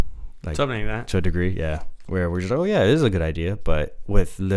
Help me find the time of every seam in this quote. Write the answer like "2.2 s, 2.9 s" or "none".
1.9 s